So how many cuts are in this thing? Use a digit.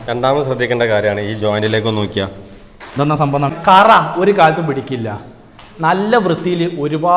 1